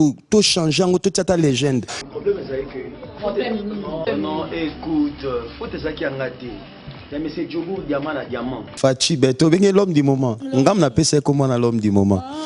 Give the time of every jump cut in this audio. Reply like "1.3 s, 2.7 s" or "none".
2.0 s, 8.6 s